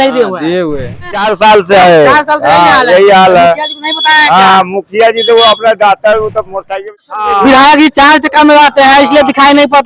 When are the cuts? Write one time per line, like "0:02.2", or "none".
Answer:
0:01.2
0:07.0